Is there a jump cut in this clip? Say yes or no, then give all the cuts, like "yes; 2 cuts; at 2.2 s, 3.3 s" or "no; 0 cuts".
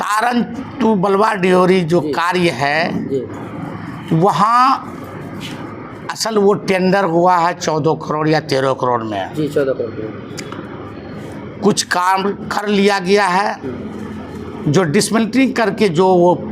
no; 0 cuts